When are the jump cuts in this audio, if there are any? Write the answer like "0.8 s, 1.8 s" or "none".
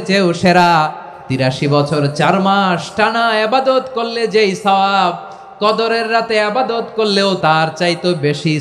1.4 s, 7.4 s